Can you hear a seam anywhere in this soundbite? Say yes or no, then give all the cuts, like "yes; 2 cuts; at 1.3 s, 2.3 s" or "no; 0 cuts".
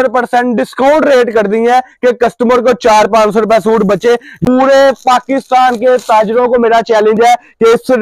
yes; 1 cut; at 4.3 s